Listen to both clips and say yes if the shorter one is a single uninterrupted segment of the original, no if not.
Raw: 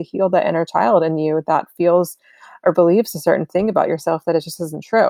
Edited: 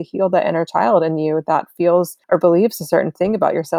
no